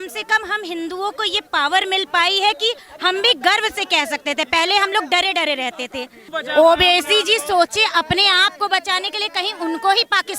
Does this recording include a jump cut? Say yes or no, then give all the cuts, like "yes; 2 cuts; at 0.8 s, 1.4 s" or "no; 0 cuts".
yes; 1 cut; at 6.2 s